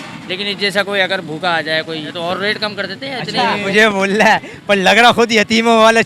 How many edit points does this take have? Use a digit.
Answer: 2